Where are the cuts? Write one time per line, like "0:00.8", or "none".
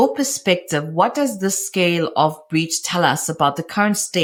none